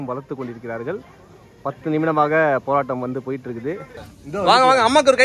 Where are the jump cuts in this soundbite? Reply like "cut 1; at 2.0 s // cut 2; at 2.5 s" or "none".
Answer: cut 1; at 4.1 s